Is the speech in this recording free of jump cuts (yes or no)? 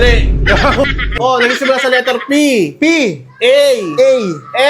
no